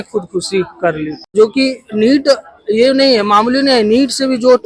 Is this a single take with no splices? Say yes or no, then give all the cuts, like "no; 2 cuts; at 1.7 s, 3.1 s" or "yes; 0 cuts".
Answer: no; 1 cut; at 1.1 s